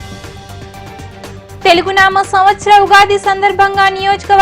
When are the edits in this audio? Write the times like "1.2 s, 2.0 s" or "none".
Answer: 1.6 s